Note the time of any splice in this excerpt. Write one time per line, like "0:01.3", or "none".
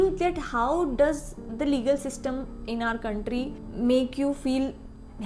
0:03.6